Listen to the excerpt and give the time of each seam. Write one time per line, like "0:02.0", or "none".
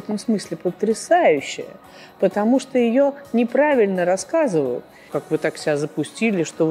0:05.1